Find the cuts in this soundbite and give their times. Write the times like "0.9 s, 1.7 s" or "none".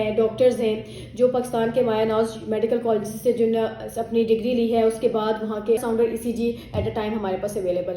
5.8 s